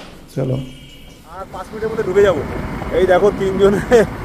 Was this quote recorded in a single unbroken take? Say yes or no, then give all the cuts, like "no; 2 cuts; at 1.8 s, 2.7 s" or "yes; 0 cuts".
no; 1 cut; at 1.5 s